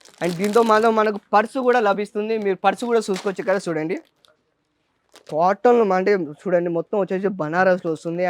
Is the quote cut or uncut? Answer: uncut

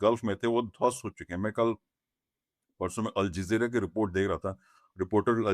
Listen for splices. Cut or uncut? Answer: uncut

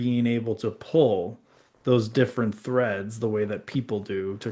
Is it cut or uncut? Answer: uncut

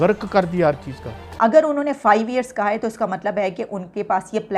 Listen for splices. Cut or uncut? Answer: cut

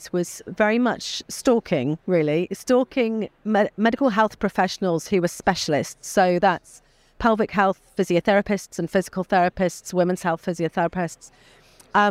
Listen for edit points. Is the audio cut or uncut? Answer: uncut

